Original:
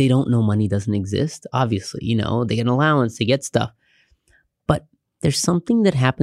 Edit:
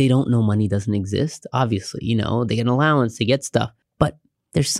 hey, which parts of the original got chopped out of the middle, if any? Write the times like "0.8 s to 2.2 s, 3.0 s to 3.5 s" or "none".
3.8 s to 4.5 s